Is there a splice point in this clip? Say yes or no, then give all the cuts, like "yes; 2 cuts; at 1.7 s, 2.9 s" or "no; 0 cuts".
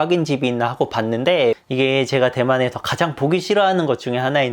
yes; 1 cut; at 1.6 s